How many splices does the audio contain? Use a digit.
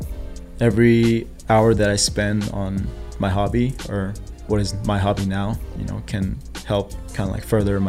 0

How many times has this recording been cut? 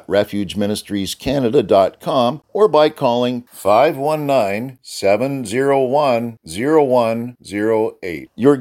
1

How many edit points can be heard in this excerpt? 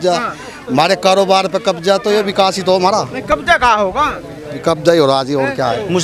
0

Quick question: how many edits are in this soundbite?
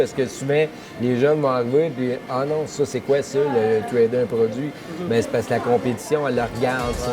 0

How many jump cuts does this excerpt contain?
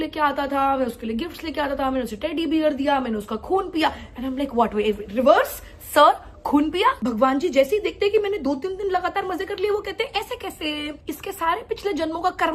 2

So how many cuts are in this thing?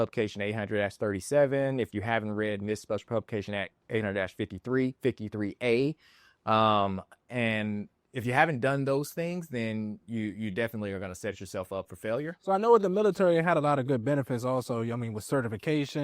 1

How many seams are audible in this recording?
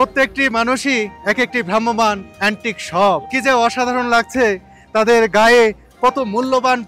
3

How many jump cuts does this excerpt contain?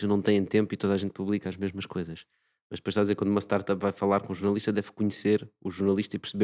0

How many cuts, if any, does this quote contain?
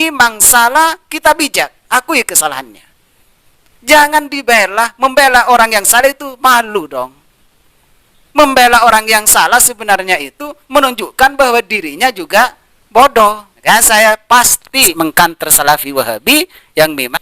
1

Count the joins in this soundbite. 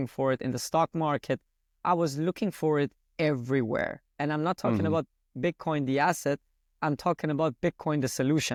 0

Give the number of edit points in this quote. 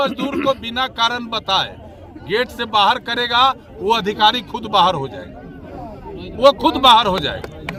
0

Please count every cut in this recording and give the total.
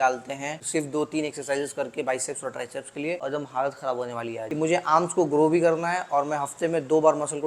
1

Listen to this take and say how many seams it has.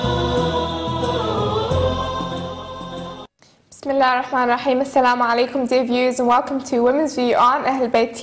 1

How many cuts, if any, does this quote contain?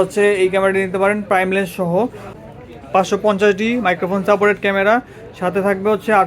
1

